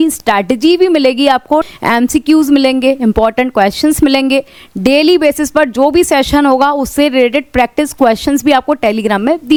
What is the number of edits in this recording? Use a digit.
0